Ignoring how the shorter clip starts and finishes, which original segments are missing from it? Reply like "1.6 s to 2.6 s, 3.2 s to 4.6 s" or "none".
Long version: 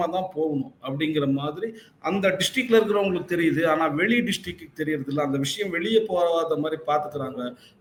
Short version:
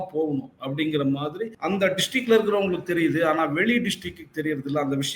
1.7 s to 1.9 s